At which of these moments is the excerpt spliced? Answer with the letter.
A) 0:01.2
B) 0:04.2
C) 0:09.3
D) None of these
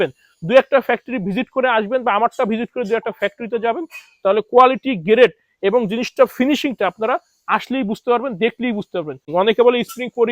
C